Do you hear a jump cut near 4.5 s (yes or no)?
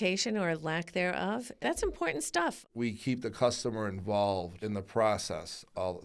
yes